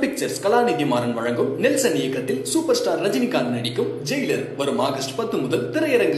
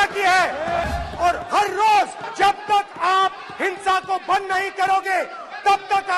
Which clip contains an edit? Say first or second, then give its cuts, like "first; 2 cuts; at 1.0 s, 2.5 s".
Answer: second; 2 cuts; at 0.8 s, 2.2 s